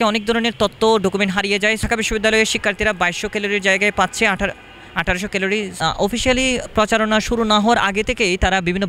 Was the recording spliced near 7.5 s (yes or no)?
no